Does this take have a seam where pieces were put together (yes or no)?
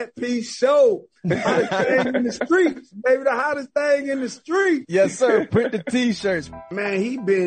yes